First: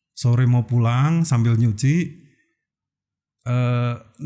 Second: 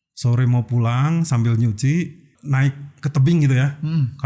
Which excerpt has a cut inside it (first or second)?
second